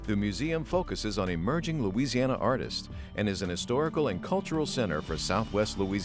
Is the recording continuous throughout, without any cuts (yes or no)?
yes